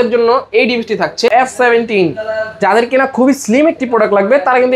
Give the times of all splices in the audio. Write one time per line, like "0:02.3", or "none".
0:01.3